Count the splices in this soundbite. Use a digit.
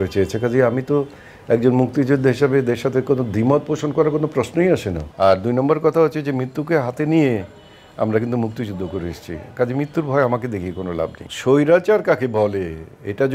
2